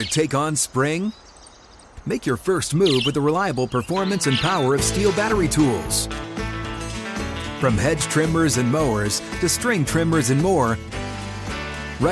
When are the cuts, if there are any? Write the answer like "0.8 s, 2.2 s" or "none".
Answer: none